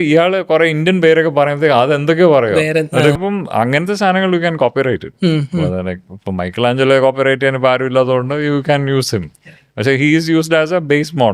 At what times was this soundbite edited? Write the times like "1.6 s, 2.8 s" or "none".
3.2 s